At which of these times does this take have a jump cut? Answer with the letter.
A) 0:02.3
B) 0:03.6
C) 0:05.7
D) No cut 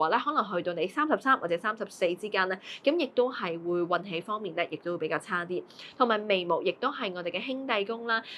D